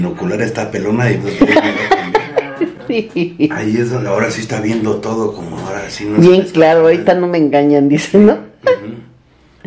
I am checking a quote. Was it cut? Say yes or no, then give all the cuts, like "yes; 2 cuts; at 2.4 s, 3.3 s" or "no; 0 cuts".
no; 0 cuts